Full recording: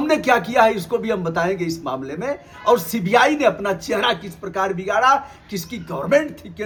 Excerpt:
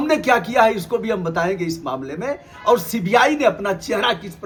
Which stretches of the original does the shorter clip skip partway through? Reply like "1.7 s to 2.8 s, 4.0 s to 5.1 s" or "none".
none